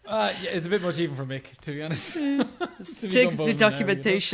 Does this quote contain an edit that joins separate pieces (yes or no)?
no